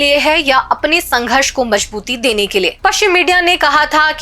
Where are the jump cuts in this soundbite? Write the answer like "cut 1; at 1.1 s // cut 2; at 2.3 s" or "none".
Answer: cut 1; at 2.7 s